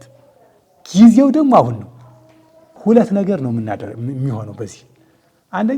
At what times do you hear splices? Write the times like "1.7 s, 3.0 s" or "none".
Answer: 2.7 s